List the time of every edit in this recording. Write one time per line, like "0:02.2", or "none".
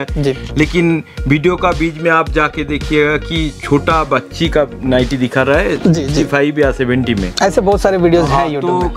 none